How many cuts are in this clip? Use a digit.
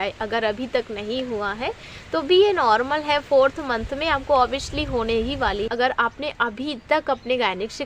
1